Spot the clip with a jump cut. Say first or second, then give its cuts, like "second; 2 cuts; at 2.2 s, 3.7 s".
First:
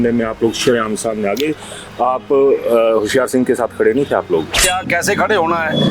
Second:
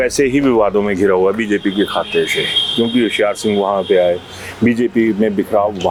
first; 1 cut; at 4.6 s